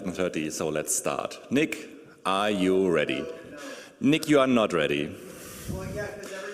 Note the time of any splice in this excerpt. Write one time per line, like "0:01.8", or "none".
none